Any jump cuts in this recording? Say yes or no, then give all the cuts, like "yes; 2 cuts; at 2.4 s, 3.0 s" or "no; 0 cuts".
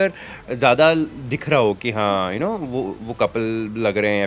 no; 0 cuts